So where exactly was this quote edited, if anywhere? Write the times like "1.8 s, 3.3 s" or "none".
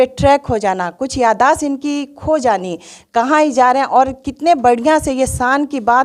none